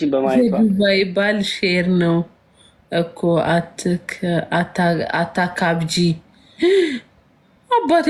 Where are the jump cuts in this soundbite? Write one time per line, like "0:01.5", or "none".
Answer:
none